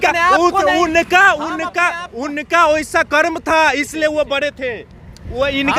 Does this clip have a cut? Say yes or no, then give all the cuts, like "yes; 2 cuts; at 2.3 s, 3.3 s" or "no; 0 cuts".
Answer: no; 0 cuts